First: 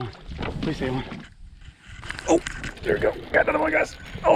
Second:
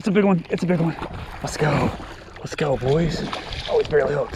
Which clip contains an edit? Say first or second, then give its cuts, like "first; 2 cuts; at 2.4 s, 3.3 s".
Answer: first; 1 cut; at 1.2 s